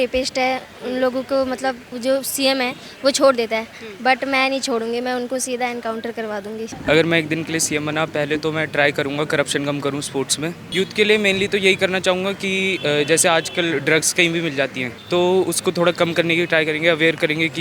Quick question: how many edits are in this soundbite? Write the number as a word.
four